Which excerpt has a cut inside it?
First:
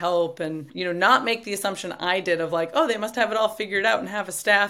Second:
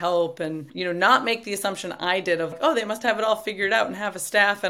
second; 1 cut; at 2.5 s

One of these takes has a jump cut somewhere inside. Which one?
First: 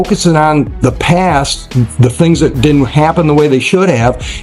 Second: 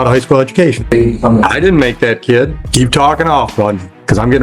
second; 2 cuts; at 0.8 s, 2.6 s

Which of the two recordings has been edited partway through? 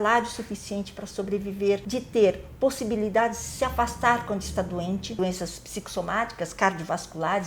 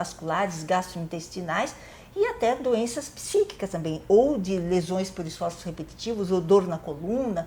first; 2 cuts; at 1.8 s, 5.2 s

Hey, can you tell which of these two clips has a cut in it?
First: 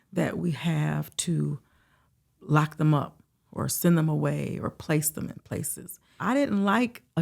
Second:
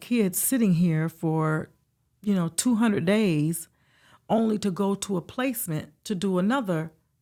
first; 1 cut; at 6.2 s

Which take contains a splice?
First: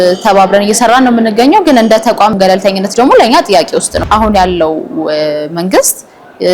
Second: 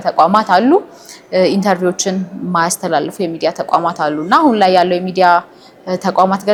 first; 2 cuts; at 2.3 s, 4.0 s

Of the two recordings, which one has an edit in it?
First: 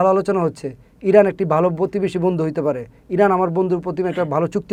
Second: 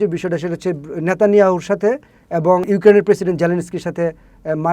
second; 1 cut; at 2.6 s

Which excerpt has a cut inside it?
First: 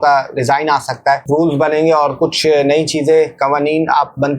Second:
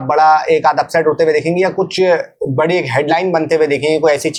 first; 1 cut; at 1.2 s

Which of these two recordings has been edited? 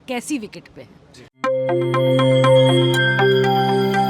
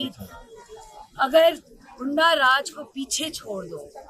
first; 1 cut; at 1.3 s

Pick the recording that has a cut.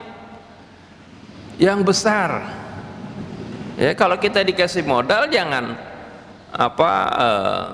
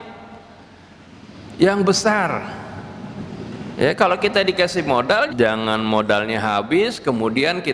second; 1 cut; at 5.3 s

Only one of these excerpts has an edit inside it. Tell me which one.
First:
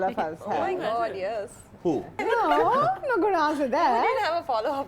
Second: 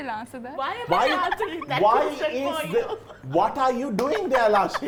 first; 1 cut; at 2.2 s

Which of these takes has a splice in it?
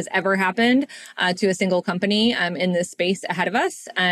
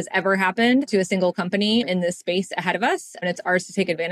second; 3 cuts; at 0.9 s, 1.9 s, 3.2 s

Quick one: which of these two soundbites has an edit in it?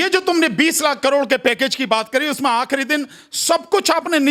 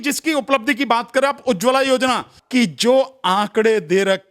second; 1 cut; at 2.3 s

